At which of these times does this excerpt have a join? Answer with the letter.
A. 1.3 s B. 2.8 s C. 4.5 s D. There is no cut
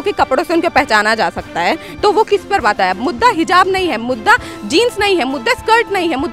B